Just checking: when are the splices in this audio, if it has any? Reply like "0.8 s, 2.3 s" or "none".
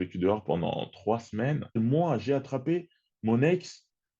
1.8 s